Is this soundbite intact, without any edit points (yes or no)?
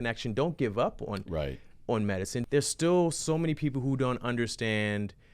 no